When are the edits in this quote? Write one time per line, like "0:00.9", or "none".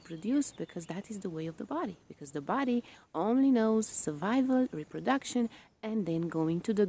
none